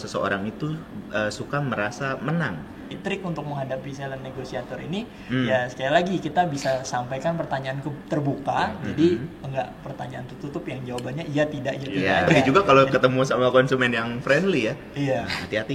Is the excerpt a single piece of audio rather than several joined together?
no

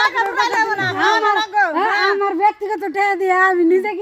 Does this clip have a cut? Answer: no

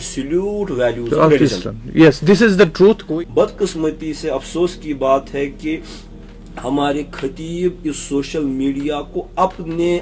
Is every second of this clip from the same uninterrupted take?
no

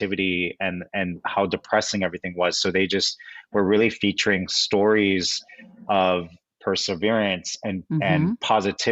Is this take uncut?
yes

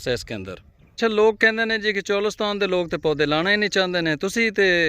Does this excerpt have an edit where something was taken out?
yes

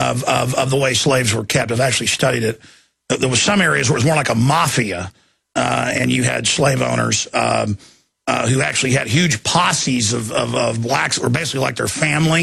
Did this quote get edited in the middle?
yes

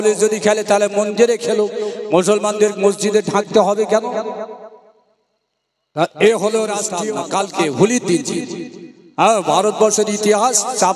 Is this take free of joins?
no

